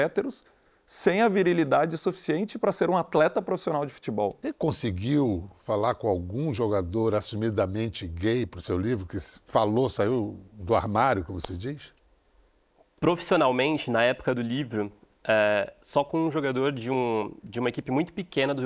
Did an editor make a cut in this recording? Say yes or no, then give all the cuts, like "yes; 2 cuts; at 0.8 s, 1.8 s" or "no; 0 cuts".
yes; 1 cut; at 4.4 s